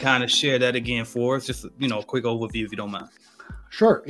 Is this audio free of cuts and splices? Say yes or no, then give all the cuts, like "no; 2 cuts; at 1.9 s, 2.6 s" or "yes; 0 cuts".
yes; 0 cuts